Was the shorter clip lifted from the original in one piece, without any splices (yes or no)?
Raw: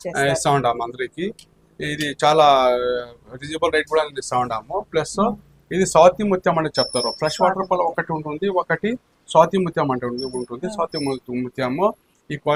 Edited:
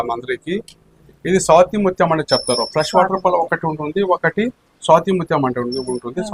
no